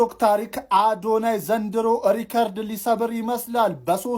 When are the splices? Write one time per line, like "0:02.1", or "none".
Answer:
none